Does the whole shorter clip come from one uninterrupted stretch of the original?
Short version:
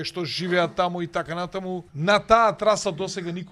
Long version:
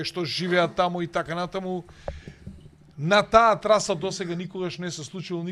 no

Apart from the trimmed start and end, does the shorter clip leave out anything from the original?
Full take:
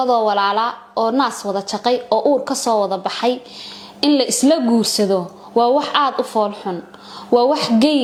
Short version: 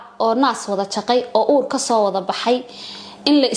no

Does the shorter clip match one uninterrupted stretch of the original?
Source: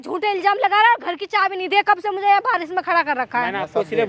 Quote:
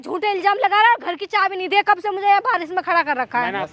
yes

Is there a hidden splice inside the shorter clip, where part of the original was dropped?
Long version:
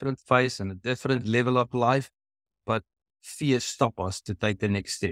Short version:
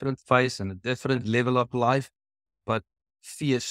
no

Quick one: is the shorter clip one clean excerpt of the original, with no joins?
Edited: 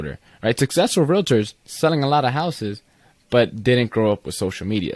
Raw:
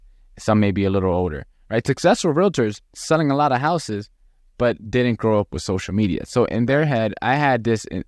yes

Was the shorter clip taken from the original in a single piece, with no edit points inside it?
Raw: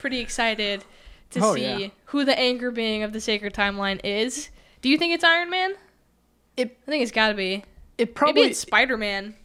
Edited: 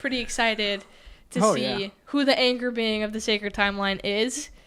yes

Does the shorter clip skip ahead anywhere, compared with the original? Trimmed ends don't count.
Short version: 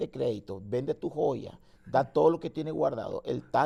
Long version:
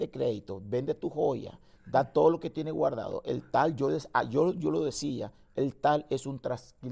no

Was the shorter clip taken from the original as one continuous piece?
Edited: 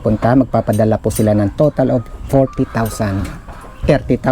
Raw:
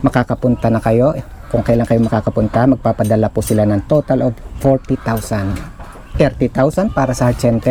yes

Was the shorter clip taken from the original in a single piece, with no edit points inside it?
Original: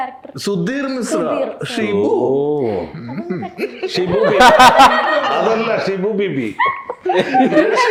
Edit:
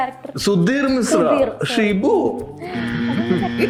yes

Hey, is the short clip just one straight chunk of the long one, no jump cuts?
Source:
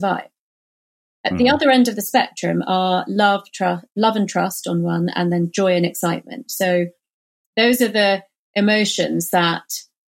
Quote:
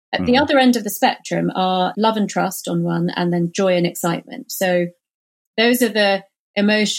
no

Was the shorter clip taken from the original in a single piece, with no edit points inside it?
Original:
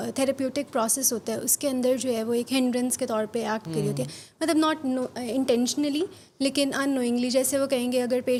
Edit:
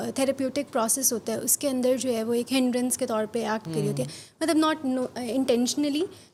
yes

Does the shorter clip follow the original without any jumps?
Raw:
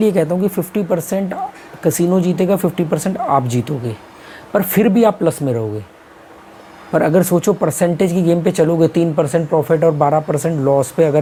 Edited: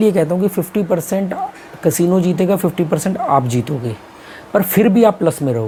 yes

